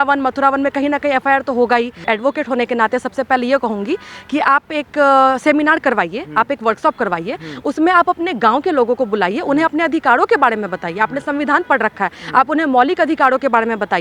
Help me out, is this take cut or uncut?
cut